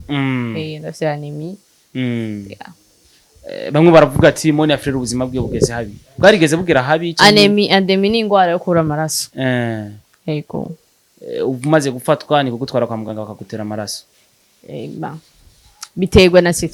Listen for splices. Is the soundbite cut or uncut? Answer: uncut